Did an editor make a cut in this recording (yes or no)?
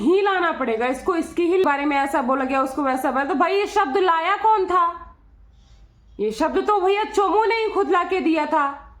yes